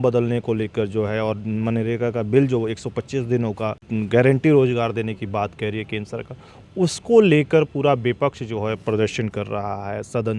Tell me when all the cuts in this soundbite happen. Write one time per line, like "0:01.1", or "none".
0:03.8